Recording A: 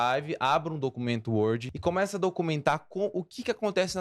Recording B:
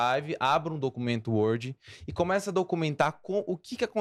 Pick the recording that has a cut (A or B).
A